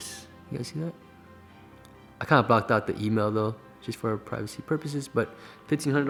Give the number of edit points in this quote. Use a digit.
0